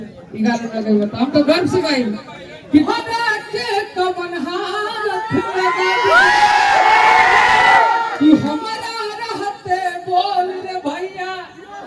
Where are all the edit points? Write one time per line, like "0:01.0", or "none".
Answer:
0:02.9